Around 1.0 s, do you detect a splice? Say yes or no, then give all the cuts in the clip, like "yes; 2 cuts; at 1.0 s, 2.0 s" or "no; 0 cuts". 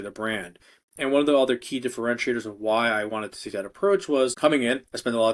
no; 1 cut; at 4.3 s